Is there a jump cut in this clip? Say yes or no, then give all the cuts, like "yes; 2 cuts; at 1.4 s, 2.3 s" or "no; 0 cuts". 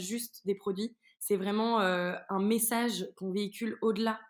no; 0 cuts